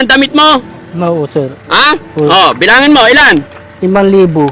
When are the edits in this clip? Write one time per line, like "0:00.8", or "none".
0:03.6